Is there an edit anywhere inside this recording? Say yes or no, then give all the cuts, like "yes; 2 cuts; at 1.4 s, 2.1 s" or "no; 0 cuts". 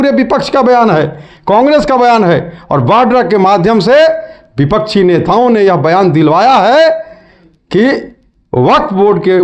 no; 0 cuts